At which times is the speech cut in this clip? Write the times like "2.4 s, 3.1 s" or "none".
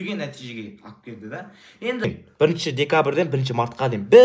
2.0 s